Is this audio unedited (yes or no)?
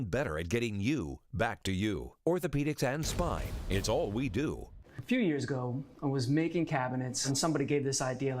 no